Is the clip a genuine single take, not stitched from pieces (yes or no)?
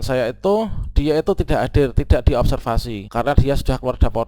no